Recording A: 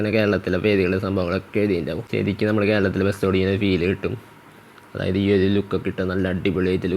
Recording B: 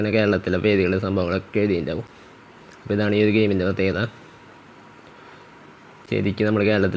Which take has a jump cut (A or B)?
A